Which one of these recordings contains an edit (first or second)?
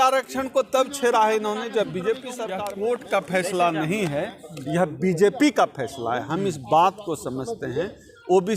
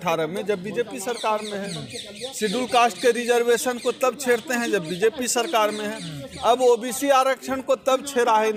first